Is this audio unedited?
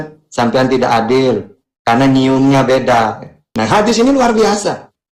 no; 1 cut; at 3.5 s

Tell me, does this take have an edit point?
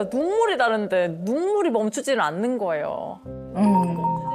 no; 0 cuts

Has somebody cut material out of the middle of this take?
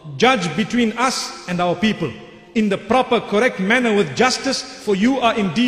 no; 0 cuts

